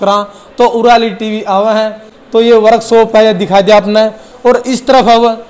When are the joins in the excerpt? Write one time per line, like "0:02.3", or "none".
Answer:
none